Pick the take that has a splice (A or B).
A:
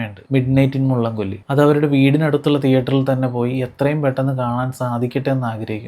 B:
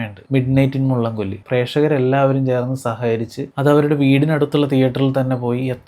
B